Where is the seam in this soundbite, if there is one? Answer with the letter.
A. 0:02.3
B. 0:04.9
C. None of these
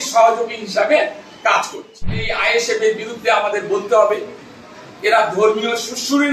A